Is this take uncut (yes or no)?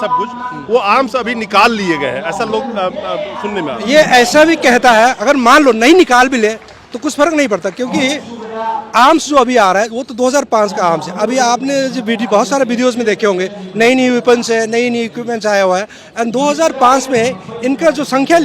yes